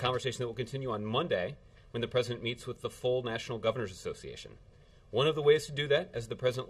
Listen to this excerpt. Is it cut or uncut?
uncut